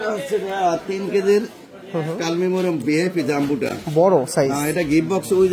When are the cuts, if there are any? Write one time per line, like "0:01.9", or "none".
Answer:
none